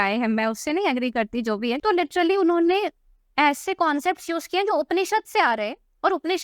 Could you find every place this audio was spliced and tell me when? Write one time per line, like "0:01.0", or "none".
0:01.8